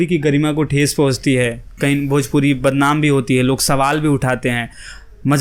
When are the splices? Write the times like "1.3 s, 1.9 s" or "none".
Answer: none